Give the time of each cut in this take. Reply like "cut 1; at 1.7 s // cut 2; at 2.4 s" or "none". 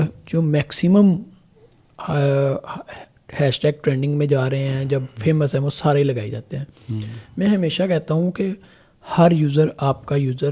none